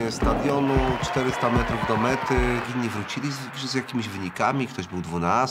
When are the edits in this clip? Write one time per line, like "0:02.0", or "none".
0:02.7

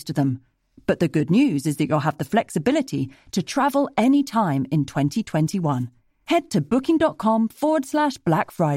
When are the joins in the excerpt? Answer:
none

